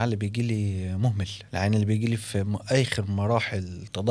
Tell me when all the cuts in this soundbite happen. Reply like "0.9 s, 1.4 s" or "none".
1.4 s